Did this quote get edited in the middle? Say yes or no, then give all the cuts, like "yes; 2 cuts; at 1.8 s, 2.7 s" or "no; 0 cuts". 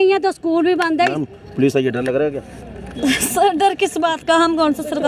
yes; 1 cut; at 1.2 s